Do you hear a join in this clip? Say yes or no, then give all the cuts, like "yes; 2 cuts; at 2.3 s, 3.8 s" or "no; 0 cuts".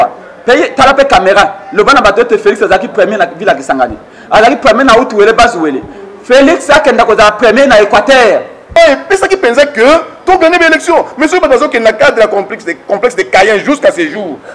yes; 1 cut; at 8.7 s